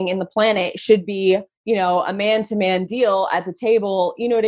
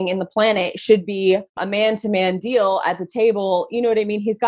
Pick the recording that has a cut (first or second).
second